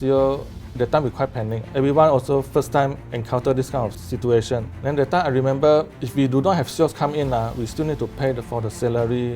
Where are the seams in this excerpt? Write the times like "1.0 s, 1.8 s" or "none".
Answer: 0.7 s, 1.6 s, 4.7 s, 6.0 s